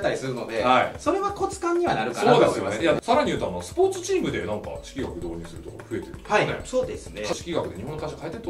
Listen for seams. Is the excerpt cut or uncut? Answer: cut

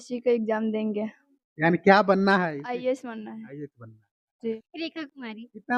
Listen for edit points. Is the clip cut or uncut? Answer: cut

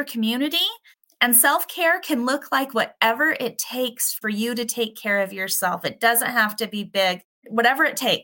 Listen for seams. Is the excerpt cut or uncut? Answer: cut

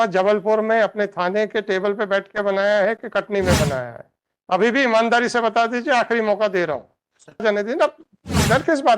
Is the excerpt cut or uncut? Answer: cut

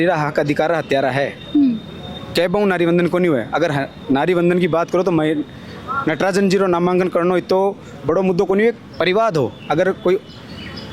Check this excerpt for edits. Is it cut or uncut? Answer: uncut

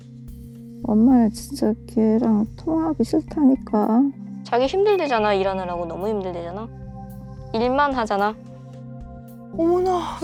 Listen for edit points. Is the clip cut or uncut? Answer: uncut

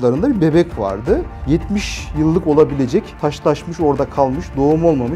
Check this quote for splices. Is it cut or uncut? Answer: cut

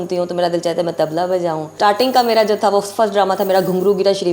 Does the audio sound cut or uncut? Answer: cut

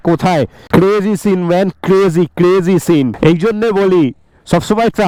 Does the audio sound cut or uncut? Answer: uncut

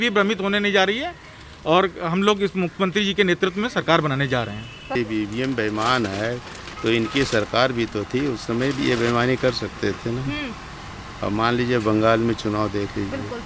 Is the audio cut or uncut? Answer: cut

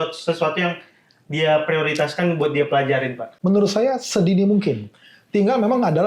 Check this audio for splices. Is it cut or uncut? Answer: cut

